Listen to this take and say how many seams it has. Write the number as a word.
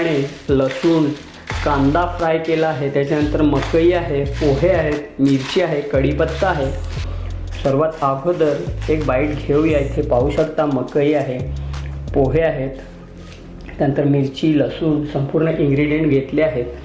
one